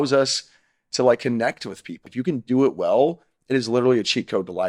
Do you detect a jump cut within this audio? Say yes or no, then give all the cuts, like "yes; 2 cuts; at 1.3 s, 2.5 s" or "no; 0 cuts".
yes; 1 cut; at 2.1 s